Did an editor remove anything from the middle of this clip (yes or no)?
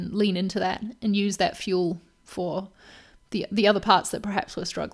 no